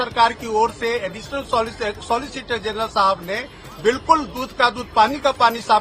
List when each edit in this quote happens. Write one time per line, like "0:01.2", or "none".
none